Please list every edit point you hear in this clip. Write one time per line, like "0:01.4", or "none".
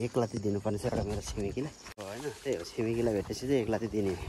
0:01.9